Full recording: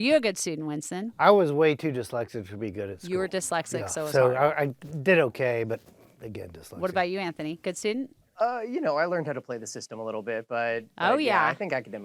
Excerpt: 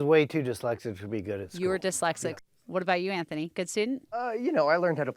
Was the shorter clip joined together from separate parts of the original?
yes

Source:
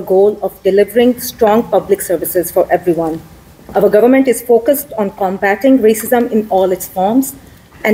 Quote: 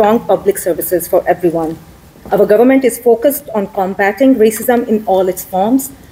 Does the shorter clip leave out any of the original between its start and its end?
no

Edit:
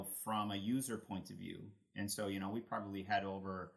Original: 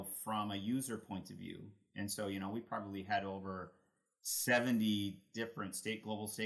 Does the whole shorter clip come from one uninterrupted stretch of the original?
yes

